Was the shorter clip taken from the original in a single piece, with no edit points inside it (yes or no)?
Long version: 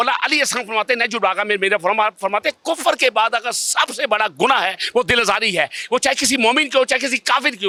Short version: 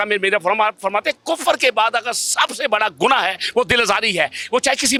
yes